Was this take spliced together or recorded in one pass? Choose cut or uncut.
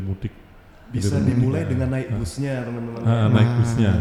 uncut